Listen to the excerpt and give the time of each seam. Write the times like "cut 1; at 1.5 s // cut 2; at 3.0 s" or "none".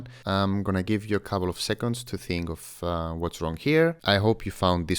cut 1; at 4.0 s